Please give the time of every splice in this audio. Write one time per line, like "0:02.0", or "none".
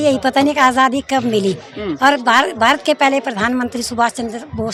none